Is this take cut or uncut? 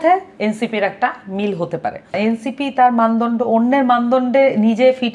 cut